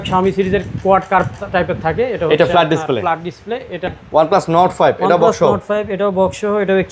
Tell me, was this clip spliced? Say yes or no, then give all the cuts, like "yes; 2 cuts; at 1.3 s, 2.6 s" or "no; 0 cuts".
yes; 1 cut; at 4.0 s